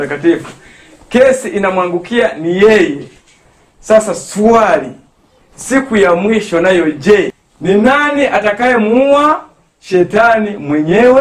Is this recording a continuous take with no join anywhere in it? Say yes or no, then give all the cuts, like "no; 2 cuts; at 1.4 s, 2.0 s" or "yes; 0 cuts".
no; 1 cut; at 7.3 s